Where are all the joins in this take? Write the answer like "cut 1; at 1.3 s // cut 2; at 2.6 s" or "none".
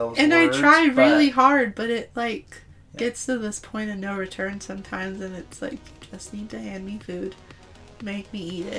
none